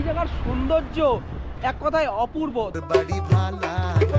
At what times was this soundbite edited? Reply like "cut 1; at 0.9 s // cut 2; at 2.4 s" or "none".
cut 1; at 2.8 s